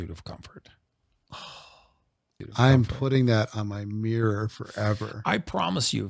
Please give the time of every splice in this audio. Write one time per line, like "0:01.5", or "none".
0:02.3